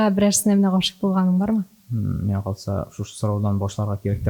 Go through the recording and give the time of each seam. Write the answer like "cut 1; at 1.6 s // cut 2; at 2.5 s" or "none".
cut 1; at 1.8 s